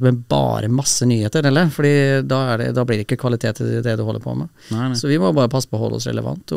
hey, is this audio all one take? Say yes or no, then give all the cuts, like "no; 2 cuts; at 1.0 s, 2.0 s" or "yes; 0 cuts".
yes; 0 cuts